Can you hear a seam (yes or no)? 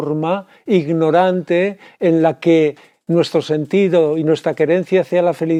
no